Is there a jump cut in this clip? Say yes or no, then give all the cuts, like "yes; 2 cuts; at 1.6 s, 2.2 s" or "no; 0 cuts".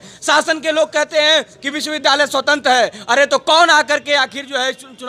no; 0 cuts